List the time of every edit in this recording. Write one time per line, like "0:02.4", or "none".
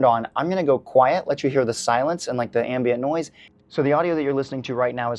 0:03.4